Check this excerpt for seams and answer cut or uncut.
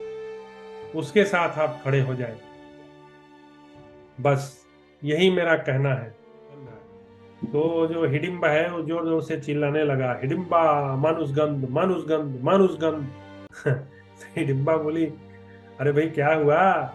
cut